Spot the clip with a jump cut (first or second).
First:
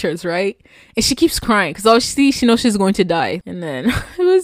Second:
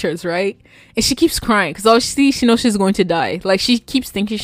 first